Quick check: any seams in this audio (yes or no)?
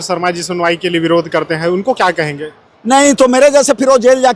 no